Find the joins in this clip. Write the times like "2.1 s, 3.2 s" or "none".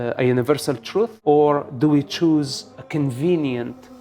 1.2 s, 2.8 s

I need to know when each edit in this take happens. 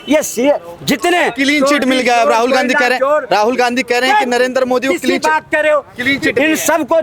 none

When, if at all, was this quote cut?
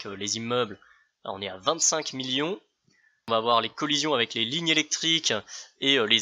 3.3 s

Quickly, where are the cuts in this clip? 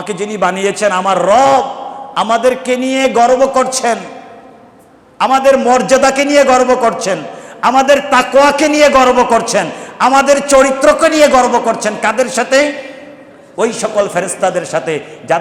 none

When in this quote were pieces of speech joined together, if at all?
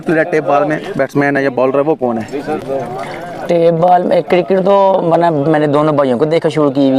none

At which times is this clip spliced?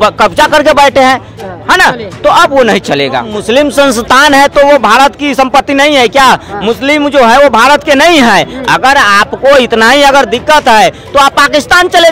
3.4 s

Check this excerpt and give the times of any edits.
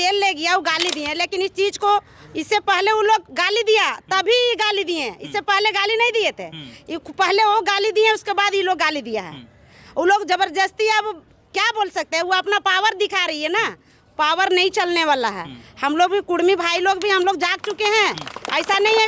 none

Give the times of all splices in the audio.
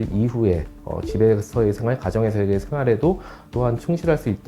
none

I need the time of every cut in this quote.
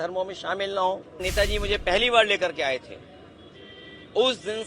1.2 s

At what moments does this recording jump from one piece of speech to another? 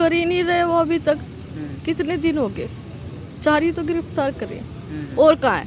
none

